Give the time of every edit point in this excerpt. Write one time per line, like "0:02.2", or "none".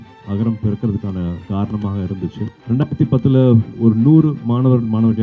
0:01.4
0:02.6
0:03.7